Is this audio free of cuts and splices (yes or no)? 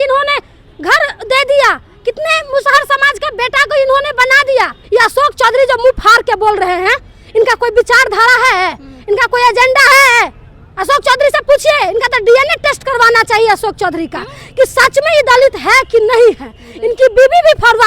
no